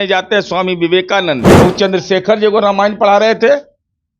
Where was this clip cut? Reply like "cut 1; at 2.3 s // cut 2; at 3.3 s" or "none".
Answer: cut 1; at 1.6 s